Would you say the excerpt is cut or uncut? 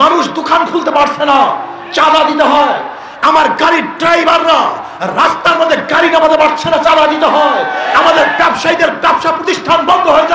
uncut